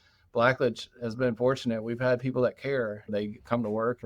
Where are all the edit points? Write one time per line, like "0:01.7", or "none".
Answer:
0:03.1